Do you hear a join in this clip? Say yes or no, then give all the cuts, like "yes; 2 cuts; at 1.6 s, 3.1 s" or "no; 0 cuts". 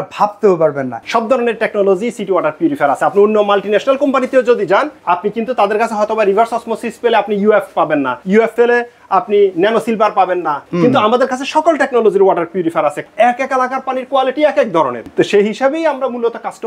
yes; 6 cuts; at 1.0 s, 4.9 s, 8.4 s, 10.7 s, 13.0 s, 15.0 s